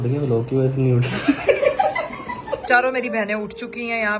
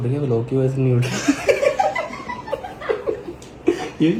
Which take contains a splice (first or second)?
first